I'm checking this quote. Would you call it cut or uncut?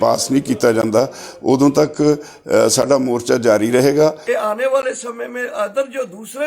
cut